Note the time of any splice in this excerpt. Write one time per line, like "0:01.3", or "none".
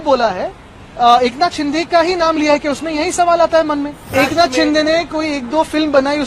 0:04.1